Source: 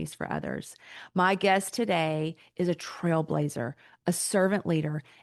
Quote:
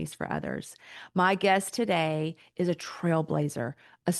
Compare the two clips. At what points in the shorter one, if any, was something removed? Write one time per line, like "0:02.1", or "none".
none